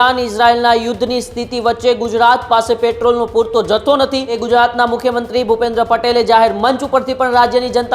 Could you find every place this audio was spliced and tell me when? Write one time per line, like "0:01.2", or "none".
0:04.3